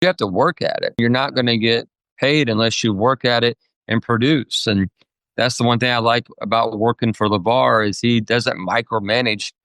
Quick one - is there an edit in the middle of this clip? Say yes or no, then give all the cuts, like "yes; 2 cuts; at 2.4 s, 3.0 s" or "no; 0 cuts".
yes; 1 cut; at 1.0 s